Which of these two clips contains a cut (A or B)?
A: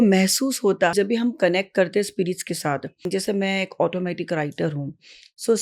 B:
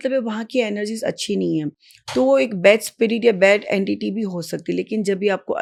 A